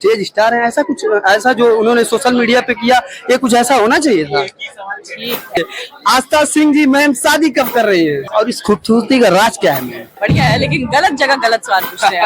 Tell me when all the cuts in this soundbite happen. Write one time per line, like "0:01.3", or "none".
0:05.6
0:08.2
0:10.2